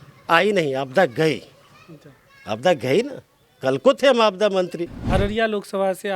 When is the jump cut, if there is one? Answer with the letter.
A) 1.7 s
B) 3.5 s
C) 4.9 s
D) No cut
C